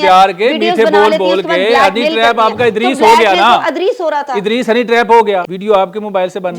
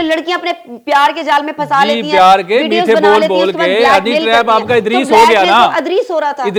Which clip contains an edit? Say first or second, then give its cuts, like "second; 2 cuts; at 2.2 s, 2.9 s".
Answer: first; 1 cut; at 5.5 s